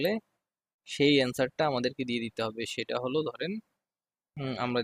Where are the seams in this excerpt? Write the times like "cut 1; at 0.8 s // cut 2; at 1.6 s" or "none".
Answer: none